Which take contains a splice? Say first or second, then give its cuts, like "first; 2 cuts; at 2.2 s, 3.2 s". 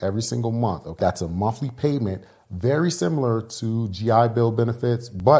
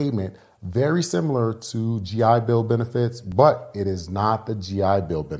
first; 1 cut; at 1.0 s